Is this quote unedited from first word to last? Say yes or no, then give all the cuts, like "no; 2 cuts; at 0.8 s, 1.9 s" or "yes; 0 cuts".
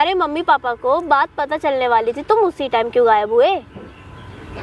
yes; 0 cuts